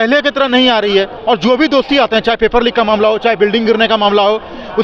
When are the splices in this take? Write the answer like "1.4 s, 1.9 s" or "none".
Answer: 1.1 s

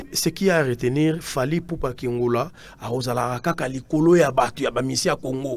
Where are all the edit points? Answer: none

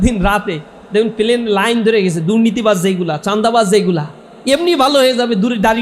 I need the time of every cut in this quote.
none

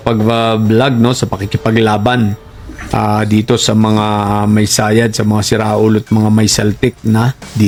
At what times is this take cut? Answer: none

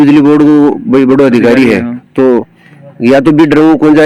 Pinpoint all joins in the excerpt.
none

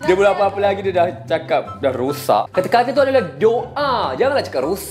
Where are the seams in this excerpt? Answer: 2.5 s

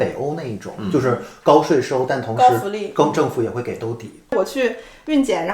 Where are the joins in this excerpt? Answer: 4.3 s

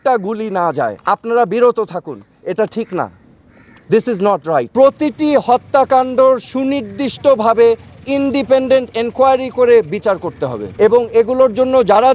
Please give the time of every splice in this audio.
none

